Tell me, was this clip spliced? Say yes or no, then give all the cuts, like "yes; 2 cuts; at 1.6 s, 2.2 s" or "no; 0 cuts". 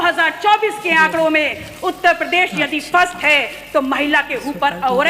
no; 0 cuts